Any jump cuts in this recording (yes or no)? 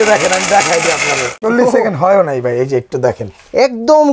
no